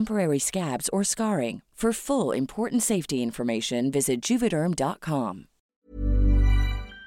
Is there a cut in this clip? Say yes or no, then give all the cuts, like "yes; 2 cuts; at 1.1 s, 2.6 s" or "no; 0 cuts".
yes; 1 cut; at 5.7 s